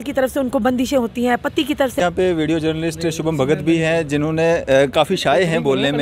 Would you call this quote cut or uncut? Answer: cut